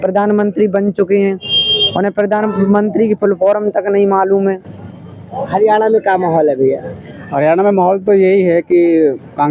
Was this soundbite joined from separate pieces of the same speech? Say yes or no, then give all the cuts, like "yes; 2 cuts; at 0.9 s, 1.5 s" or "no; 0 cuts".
no; 0 cuts